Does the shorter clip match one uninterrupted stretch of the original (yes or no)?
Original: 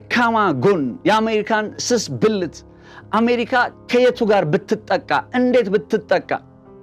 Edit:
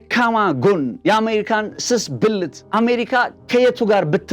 no